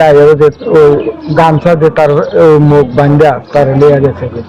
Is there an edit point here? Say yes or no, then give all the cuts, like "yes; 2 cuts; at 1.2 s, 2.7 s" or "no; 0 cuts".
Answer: no; 0 cuts